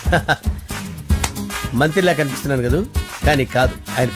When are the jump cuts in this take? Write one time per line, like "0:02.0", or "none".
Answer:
none